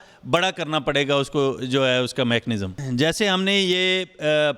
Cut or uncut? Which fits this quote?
cut